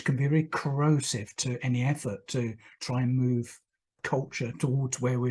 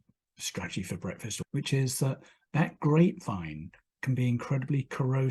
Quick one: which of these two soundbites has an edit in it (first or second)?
second